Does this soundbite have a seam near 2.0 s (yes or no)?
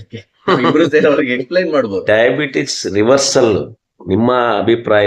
yes